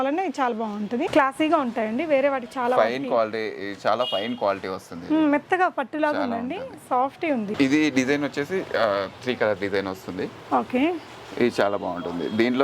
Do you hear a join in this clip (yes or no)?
yes